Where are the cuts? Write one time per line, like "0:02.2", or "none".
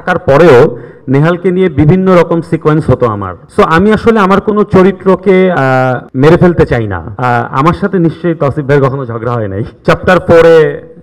0:03.4
0:07.1
0:09.7